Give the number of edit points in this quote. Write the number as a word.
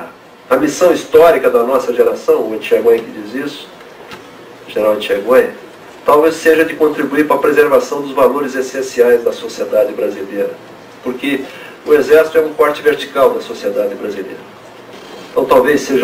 zero